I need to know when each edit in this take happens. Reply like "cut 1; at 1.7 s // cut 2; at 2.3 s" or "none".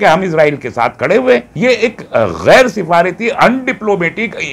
cut 1; at 1.5 s